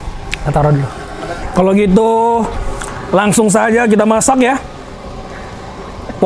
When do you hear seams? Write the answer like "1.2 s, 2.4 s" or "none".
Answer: none